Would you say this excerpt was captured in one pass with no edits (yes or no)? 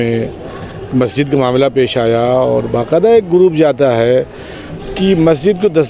yes